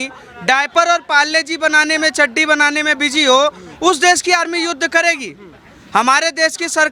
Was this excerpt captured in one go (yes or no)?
yes